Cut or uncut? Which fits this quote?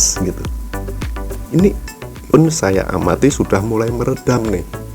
cut